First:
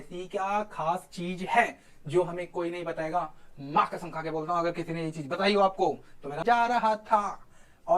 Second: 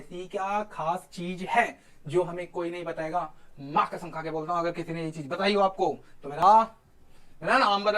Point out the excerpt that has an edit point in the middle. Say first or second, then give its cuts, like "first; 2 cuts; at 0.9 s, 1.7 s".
first; 1 cut; at 6.3 s